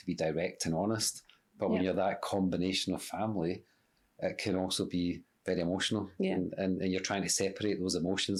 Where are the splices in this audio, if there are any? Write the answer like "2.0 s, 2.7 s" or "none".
none

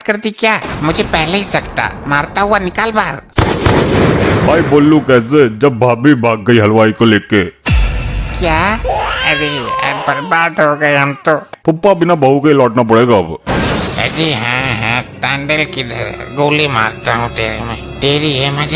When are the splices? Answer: 3.2 s, 11.5 s

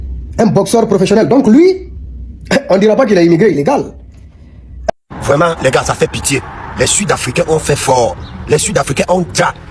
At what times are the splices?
4.8 s

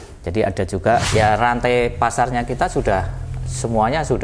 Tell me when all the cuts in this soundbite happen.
1.1 s

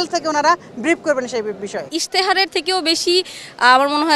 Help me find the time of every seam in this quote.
1.9 s

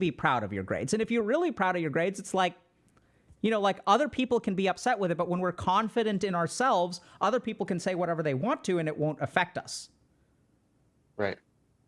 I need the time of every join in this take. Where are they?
none

